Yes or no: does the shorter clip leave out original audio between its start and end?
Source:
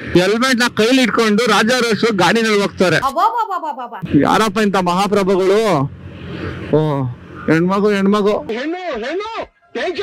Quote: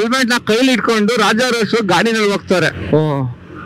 yes